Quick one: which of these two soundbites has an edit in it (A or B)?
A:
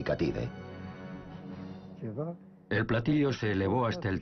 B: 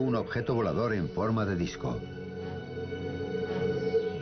B